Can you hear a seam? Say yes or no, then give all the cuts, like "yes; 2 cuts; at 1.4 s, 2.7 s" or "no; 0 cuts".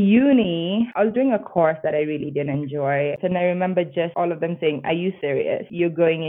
yes; 4 cuts; at 0.9 s, 3.1 s, 4.1 s, 5.3 s